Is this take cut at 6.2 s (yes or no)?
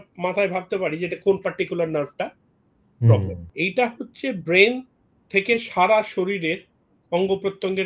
no